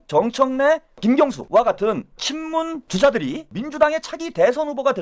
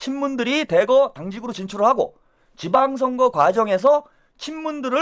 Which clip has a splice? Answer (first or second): first